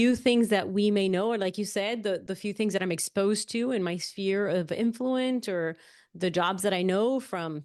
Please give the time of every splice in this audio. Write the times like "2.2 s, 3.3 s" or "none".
none